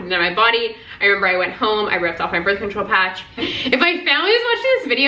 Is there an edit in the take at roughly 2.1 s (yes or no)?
no